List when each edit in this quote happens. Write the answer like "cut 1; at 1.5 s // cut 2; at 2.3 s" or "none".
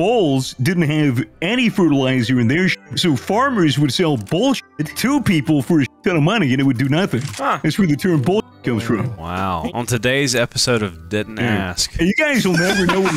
cut 1; at 9.7 s